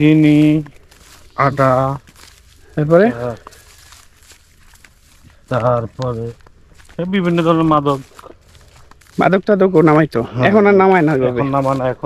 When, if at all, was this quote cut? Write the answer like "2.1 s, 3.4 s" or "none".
none